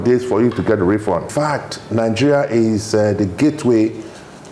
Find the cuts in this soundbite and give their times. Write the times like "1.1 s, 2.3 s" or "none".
1.3 s